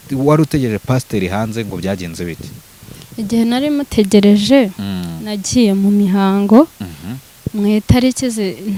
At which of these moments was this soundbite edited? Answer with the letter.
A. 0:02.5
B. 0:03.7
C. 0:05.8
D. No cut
D